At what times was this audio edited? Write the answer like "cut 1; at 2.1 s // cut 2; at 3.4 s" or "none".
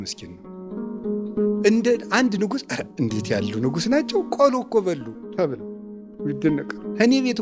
none